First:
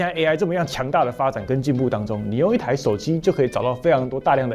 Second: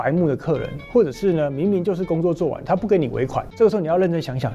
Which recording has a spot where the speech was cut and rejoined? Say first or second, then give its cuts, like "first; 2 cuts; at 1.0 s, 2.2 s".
second; 1 cut; at 3.4 s